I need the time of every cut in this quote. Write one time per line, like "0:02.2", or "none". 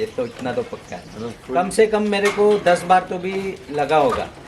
0:01.1